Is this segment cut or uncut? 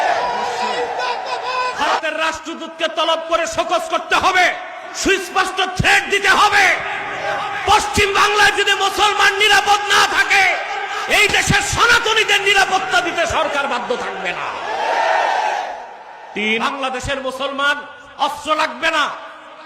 cut